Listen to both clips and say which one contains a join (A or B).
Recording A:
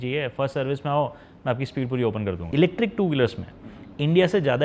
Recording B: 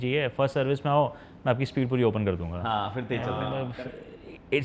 A